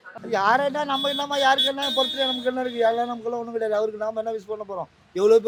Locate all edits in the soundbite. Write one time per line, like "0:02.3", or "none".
none